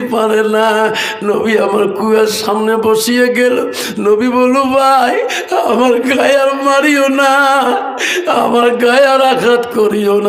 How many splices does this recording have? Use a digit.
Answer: 0